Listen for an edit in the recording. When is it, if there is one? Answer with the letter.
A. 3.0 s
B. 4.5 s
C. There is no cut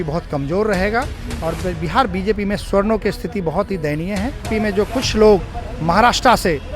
B